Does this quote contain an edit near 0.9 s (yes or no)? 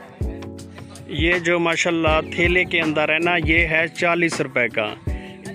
no